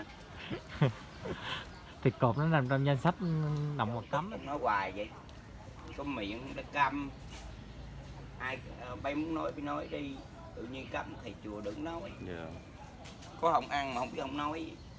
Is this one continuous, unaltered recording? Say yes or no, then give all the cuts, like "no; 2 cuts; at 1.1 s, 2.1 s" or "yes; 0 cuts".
no; 1 cut; at 4.0 s